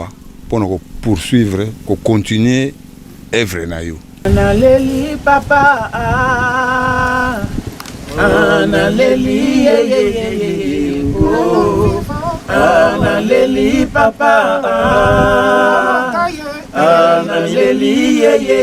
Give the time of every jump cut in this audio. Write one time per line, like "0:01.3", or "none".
0:04.3